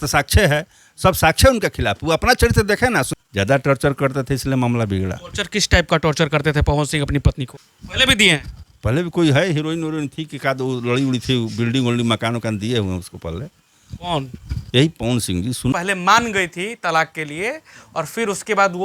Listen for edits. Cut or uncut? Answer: cut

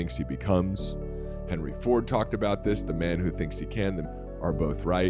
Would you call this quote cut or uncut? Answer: cut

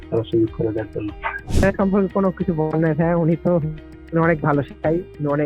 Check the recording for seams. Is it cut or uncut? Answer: cut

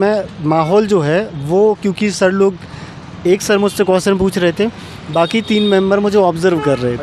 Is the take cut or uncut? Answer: uncut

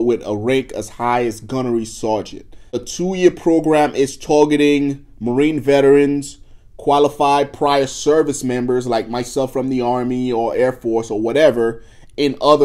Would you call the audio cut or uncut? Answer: uncut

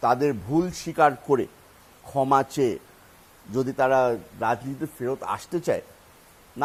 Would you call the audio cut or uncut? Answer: uncut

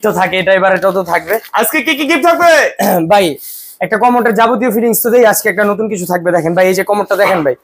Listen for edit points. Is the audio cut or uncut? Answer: uncut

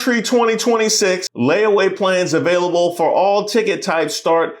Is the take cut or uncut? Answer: cut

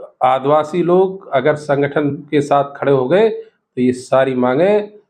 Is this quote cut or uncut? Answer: uncut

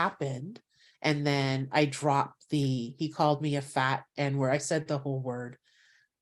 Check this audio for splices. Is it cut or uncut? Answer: uncut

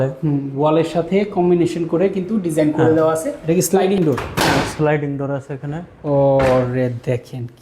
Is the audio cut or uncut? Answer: cut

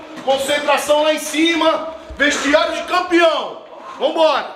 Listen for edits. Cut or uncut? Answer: uncut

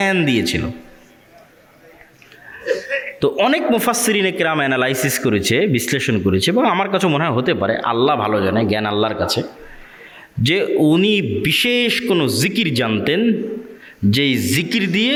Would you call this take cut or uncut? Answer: uncut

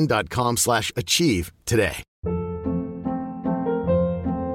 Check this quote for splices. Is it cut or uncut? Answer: cut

